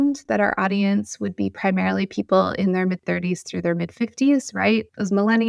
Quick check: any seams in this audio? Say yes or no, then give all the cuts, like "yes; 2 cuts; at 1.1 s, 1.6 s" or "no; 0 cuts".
no; 0 cuts